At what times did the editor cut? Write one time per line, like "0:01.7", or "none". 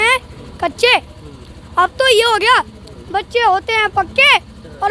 none